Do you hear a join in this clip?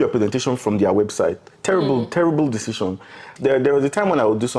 yes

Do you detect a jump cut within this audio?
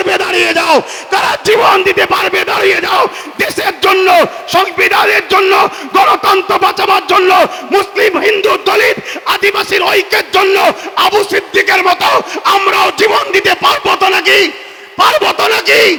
no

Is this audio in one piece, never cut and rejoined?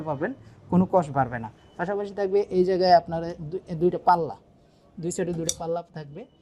yes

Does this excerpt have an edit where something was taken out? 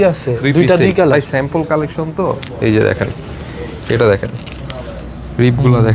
no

